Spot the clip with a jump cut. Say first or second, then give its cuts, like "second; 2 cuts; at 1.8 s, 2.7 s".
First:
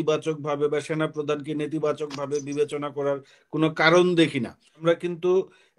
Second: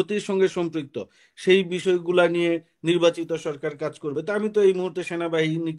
first; 1 cut; at 4.8 s